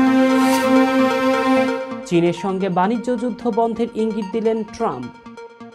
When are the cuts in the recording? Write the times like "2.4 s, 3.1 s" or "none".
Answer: none